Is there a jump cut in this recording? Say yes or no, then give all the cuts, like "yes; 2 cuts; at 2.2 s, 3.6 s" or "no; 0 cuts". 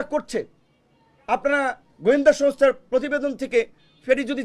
no; 0 cuts